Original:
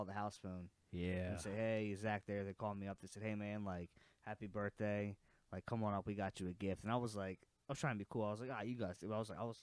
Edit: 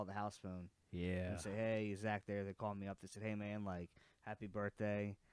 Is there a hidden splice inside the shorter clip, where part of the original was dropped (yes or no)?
no